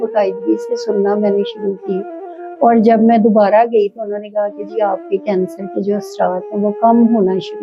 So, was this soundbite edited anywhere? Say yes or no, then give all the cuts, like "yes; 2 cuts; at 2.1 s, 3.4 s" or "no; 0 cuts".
no; 0 cuts